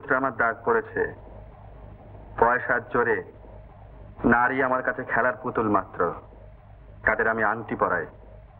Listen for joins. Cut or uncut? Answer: uncut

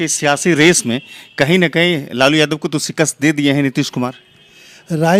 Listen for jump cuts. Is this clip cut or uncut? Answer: uncut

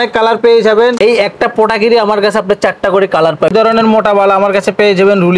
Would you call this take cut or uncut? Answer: cut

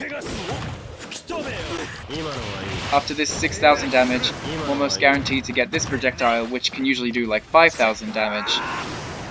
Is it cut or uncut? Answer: uncut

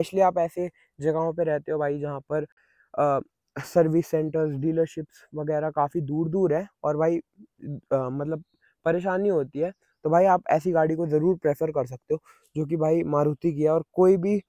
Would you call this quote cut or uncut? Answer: uncut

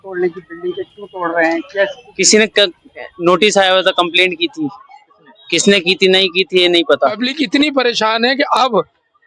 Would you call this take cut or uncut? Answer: cut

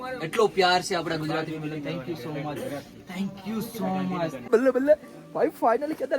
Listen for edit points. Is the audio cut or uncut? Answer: cut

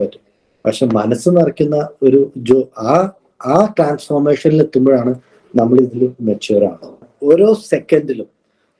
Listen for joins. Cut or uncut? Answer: cut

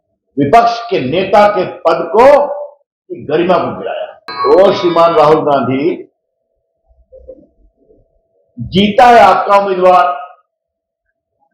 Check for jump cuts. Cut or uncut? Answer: cut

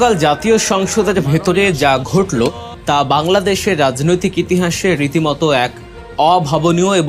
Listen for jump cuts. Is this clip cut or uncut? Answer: cut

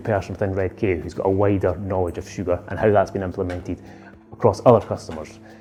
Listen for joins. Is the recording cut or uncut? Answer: uncut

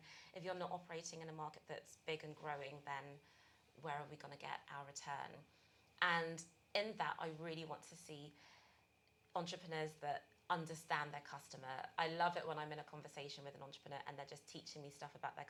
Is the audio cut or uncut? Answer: uncut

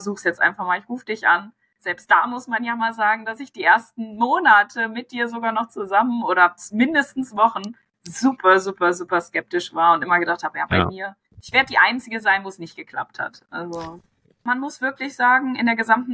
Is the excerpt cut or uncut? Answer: cut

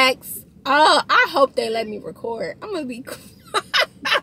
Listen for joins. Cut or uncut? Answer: uncut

